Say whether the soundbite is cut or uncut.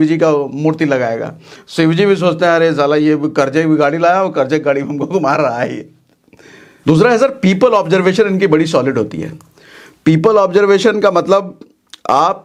uncut